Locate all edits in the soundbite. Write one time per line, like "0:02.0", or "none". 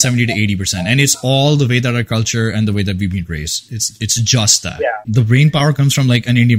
0:05.1